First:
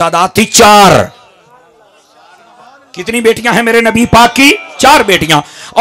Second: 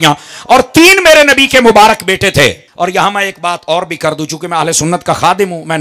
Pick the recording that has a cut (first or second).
second